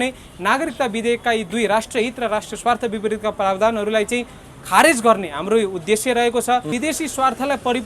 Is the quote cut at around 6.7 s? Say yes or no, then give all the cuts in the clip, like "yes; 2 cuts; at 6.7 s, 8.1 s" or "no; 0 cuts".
yes; 1 cut; at 6.7 s